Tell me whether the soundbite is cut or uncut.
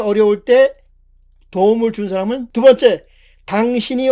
cut